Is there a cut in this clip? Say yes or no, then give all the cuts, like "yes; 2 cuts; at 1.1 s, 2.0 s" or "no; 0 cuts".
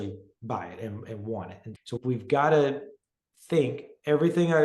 no; 0 cuts